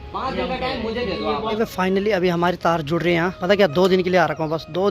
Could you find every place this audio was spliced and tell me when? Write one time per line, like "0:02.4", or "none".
0:01.5
0:03.4

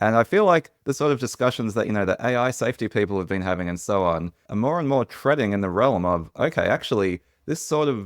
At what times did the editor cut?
0:00.9

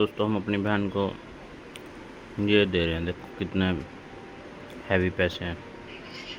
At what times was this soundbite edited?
none

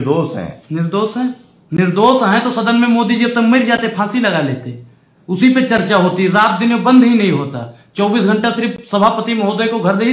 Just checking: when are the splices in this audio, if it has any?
none

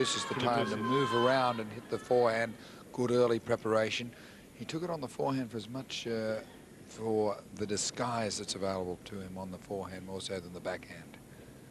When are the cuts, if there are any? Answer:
0:06.1

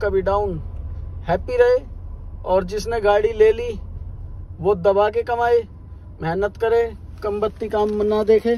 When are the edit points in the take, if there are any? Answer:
none

